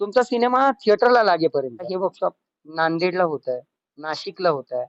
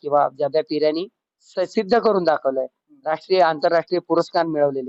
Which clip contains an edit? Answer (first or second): first